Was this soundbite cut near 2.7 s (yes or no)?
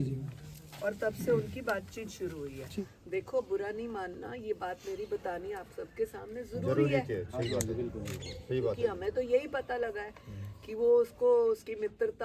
yes